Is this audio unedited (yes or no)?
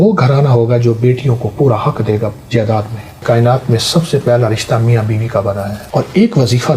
no